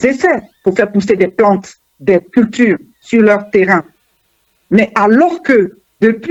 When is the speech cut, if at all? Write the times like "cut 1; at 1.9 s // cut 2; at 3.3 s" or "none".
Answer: none